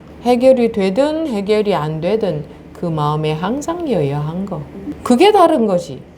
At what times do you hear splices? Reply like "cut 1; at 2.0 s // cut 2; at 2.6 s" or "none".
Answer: cut 1; at 4.9 s